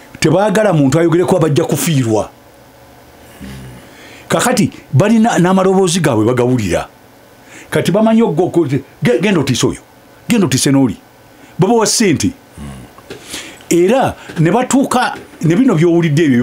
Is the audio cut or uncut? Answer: uncut